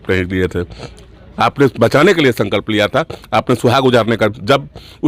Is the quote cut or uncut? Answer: uncut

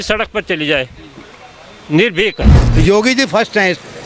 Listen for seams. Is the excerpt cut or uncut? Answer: cut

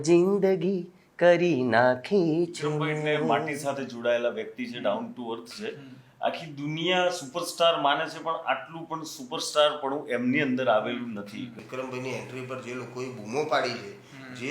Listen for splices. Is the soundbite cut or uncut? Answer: cut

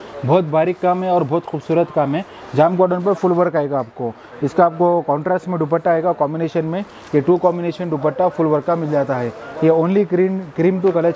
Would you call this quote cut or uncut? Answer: uncut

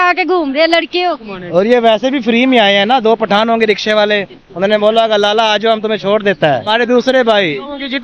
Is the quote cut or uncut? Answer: cut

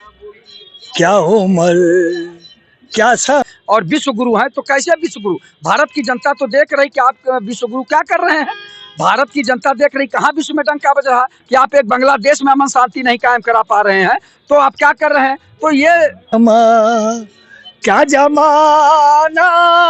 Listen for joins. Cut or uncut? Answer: cut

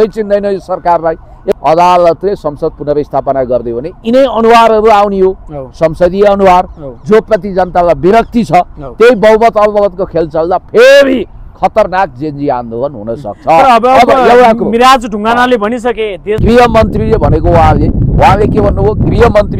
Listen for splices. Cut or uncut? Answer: cut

